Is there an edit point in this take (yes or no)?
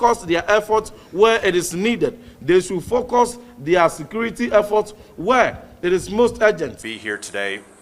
yes